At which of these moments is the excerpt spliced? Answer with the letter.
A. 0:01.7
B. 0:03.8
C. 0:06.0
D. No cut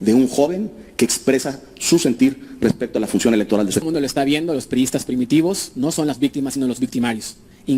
B